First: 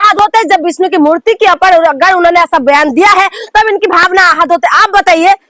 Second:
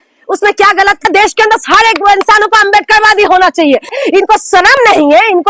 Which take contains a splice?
second; 2 cuts; at 1.0 s, 4.0 s

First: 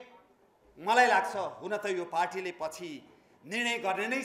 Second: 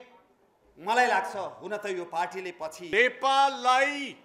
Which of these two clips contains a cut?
second; 1 cut; at 2.9 s

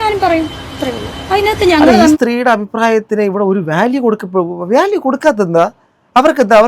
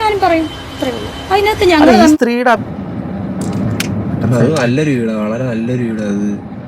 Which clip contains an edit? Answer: second; 1 cut; at 2.7 s

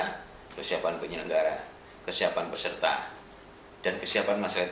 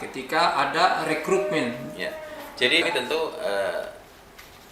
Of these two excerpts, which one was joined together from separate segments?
second; 1 cut; at 2.8 s

